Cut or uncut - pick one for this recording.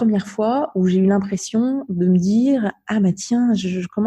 uncut